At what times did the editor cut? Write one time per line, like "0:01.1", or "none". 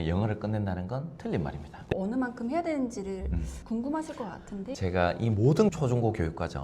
0:01.9
0:04.7